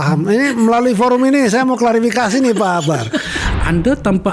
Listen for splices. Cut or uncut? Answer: cut